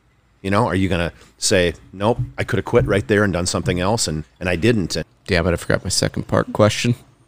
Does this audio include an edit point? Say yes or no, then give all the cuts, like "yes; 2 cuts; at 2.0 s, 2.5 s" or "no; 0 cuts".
yes; 2 cuts; at 4.3 s, 5.0 s